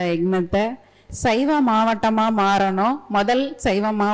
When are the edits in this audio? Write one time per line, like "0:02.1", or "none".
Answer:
0:01.1